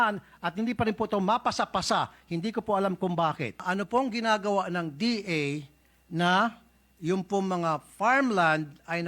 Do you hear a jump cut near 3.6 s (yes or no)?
yes